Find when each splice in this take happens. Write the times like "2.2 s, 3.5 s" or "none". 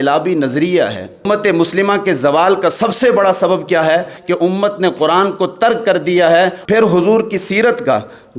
1.2 s, 4.1 s, 6.6 s

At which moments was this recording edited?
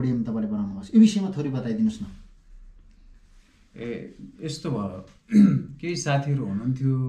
none

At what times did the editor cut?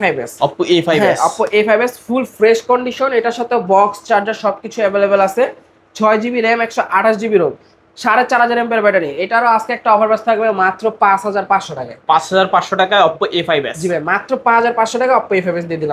none

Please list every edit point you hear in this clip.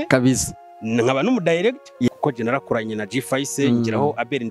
2.1 s

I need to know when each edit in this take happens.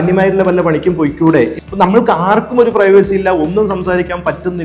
1.5 s

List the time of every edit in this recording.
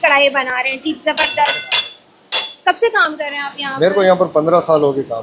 none

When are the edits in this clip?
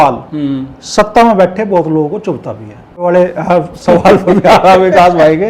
3.0 s

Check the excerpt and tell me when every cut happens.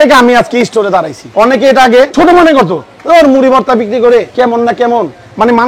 1.2 s, 2.1 s, 4.3 s

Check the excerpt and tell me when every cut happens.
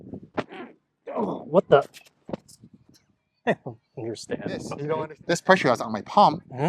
4.7 s

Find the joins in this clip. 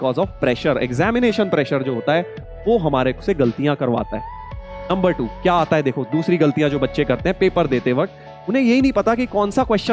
none

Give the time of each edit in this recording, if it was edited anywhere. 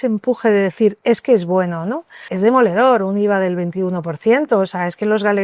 2.3 s

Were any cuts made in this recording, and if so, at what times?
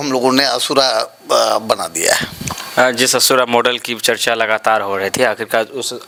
none

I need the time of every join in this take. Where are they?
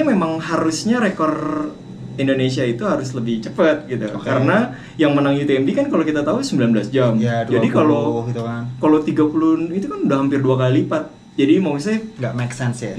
none

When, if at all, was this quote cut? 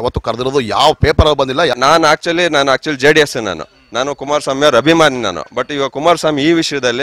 1.7 s

